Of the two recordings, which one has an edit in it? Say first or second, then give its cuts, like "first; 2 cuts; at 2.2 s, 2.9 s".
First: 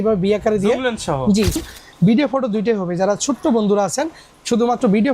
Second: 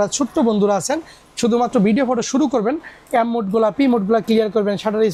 first; 1 cut; at 1.6 s